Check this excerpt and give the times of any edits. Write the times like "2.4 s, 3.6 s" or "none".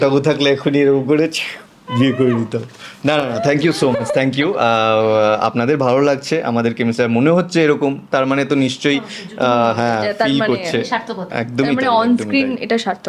none